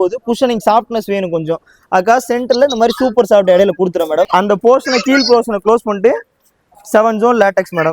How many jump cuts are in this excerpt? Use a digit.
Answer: 1